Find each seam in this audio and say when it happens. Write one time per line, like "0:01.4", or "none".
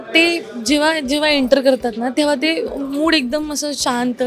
none